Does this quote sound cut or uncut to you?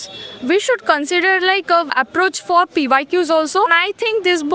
cut